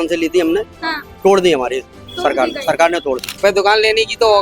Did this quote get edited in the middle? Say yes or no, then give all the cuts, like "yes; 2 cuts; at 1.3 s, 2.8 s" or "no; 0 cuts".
yes; 1 cut; at 3.3 s